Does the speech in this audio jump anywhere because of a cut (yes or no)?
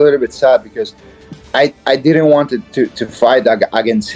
no